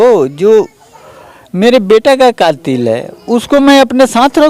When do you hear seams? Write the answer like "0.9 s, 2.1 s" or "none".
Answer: none